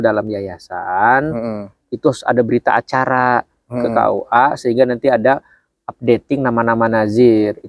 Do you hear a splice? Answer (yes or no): no